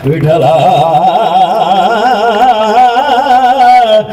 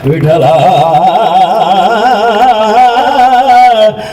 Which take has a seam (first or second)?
second